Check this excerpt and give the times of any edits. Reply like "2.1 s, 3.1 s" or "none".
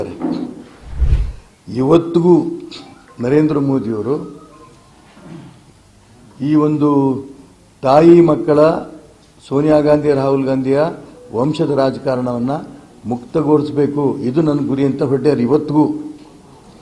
1.0 s